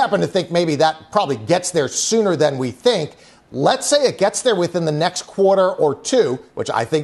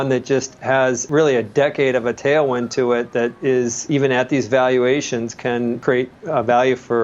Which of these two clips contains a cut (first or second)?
second